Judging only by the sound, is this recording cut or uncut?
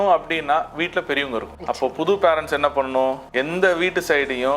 cut